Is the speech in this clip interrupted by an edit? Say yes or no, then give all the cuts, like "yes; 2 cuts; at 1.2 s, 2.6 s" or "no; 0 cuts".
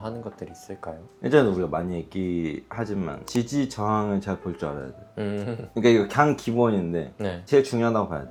no; 0 cuts